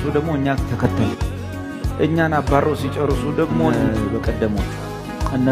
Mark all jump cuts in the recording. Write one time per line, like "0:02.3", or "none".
0:03.7